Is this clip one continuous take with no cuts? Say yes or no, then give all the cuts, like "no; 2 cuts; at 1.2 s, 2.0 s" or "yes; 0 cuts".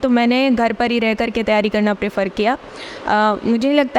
yes; 0 cuts